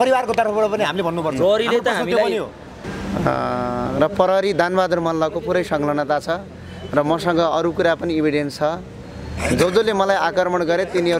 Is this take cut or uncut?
cut